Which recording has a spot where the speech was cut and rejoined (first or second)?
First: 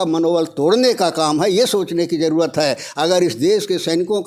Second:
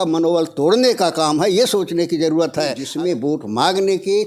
second